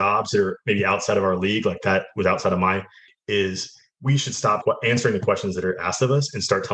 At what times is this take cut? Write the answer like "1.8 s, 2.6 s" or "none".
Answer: 3.1 s, 4.6 s